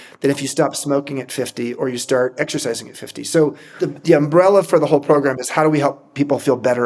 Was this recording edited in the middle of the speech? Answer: yes; 1 cut; at 3.6 s

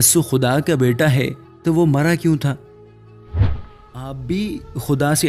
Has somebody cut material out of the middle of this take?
yes; 1 cut; at 4.2 s

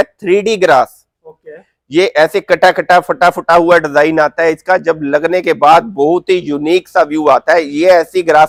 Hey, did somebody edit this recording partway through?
no; 0 cuts

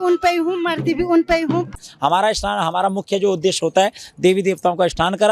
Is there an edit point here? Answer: yes; 1 cut; at 1.8 s

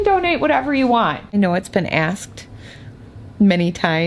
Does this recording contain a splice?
yes; 1 cut; at 1.3 s

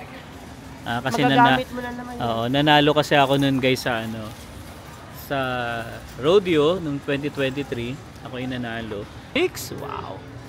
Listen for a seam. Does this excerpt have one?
yes; 1 cut; at 9.4 s

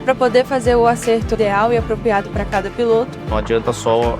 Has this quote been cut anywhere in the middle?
yes; 2 cuts; at 1.3 s, 3.2 s

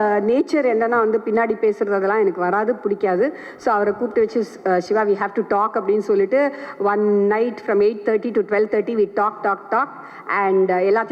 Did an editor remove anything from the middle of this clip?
no; 0 cuts

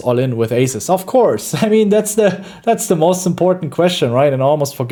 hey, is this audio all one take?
yes; 0 cuts

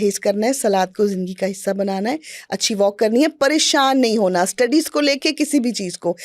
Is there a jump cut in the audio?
no; 0 cuts

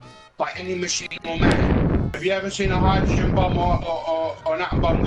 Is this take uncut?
no; 1 cut; at 2.2 s

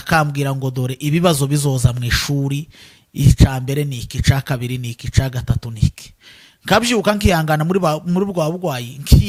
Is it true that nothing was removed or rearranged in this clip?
yes; 0 cuts

